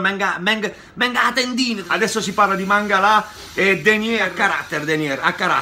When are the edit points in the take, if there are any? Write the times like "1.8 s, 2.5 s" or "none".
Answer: 1.8 s, 4.3 s